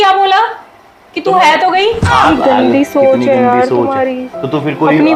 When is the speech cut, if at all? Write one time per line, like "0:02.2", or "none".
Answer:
0:02.3

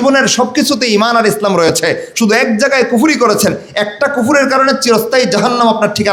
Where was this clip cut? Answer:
none

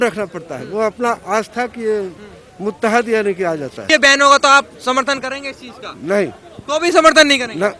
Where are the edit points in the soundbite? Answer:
0:03.9

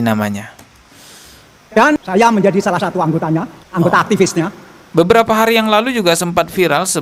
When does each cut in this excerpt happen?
0:04.9

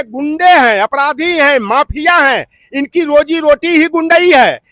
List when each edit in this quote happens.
none

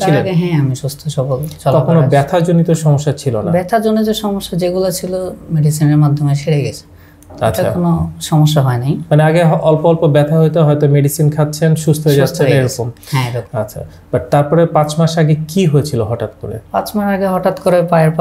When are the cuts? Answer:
none

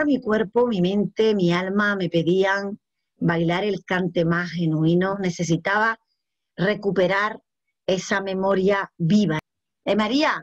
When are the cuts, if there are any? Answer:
0:05.2
0:09.4

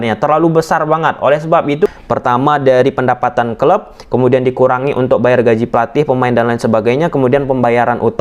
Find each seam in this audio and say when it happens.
0:01.9

